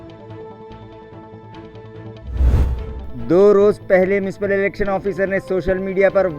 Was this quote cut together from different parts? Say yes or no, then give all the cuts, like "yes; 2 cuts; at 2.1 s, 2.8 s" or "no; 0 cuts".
yes; 1 cut; at 2.7 s